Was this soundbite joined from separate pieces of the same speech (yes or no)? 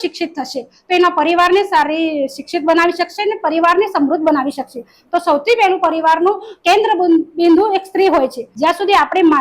yes